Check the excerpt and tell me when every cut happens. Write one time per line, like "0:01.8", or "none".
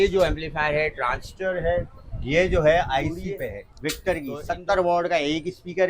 0:03.7